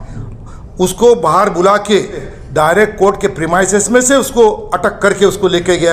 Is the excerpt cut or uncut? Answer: cut